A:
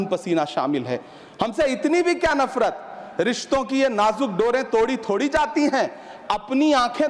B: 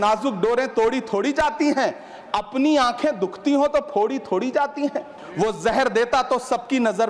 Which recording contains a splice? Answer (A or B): B